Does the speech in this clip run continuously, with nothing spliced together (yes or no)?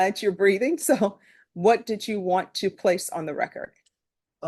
yes